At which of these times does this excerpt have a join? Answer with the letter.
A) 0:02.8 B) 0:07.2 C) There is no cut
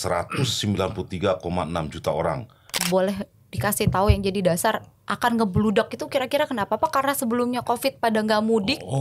A